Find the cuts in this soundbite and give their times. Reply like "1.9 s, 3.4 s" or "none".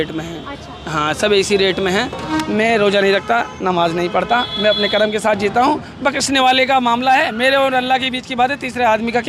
2.3 s